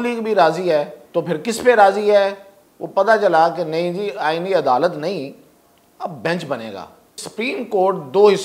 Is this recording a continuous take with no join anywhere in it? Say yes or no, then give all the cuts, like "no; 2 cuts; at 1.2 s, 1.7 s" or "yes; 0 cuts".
no; 2 cuts; at 1.0 s, 7.2 s